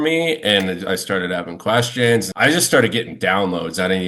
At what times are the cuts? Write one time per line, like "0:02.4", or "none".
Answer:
0:02.3